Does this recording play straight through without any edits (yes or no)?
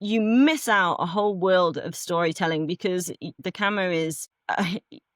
no